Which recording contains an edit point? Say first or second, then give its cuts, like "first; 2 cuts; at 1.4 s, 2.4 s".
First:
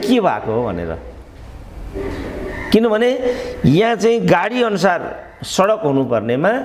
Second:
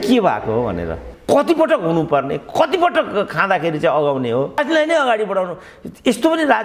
second; 2 cuts; at 1.1 s, 4.6 s